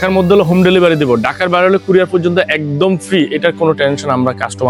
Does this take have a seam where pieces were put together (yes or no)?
no